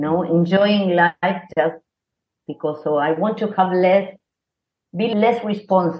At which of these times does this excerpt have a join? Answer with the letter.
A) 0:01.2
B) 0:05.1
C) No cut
B